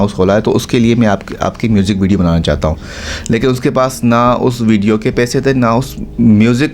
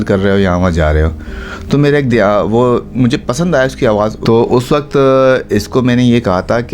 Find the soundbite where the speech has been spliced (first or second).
second